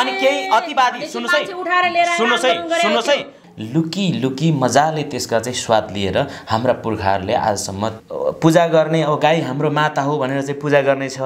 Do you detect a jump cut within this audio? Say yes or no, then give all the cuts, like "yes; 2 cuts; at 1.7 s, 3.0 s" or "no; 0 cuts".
yes; 2 cuts; at 3.4 s, 8.0 s